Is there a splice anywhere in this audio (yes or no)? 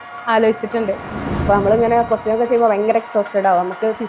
yes